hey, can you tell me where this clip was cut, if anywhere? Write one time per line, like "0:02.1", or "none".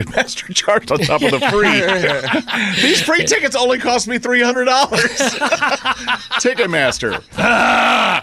0:07.2